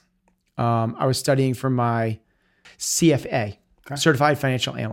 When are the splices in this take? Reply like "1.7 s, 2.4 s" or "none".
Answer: 2.7 s